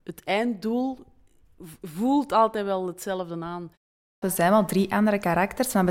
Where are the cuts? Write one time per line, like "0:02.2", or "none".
0:04.1